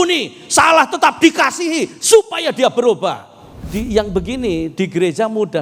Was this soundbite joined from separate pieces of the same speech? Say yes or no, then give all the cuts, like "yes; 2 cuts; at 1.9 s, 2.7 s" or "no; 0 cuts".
yes; 1 cut; at 3.7 s